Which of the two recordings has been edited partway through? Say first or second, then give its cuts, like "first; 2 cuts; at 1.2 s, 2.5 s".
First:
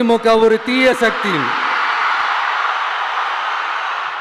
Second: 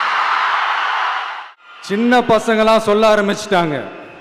second; 1 cut; at 1.3 s